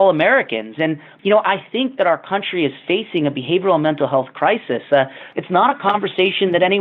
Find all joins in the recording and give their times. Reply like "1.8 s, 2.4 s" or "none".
1.1 s, 5.3 s